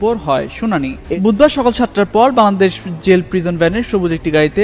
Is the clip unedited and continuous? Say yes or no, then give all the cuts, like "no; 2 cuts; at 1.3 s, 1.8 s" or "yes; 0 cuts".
no; 1 cut; at 1.1 s